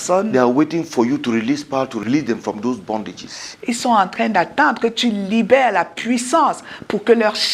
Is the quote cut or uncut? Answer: cut